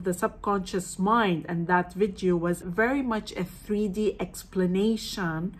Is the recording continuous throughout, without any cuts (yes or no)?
no